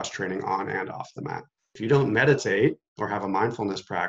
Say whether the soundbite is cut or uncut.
cut